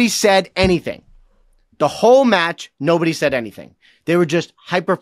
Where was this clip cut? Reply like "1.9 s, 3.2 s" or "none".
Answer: none

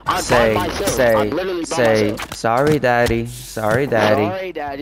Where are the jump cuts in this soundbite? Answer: none

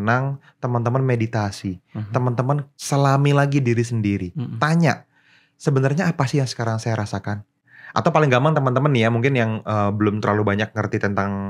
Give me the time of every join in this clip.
2.7 s, 7.6 s

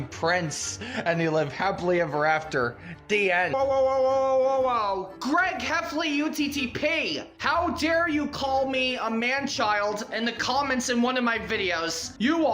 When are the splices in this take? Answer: 3.5 s

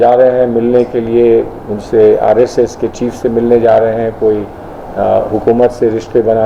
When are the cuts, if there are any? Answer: none

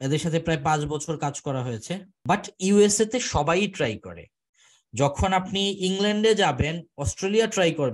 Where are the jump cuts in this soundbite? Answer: 2.1 s

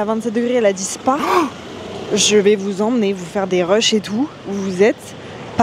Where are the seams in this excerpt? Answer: none

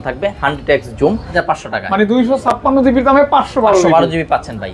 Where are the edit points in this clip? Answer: 1.4 s

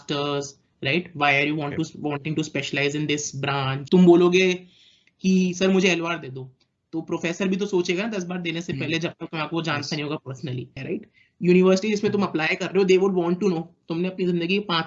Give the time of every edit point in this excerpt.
3.8 s, 10.8 s

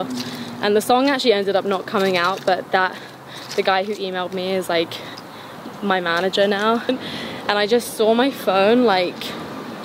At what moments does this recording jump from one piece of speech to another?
6.9 s

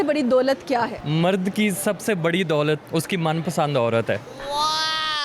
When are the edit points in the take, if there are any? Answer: 1.0 s, 2.8 s

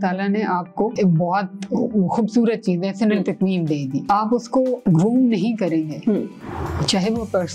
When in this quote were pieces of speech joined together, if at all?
0.9 s, 4.2 s

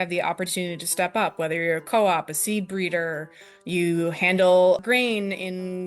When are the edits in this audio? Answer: 4.8 s

